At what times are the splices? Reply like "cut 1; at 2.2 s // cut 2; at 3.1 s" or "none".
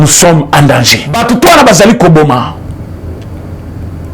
cut 1; at 1.1 s